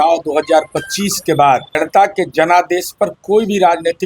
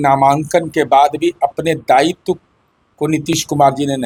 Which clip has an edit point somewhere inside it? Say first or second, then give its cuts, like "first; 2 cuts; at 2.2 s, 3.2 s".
first; 1 cut; at 1.8 s